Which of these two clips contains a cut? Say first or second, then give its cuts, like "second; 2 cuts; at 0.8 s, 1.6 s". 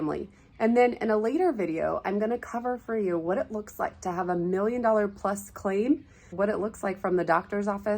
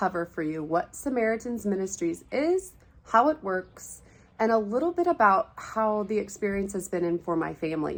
first; 1 cut; at 6.3 s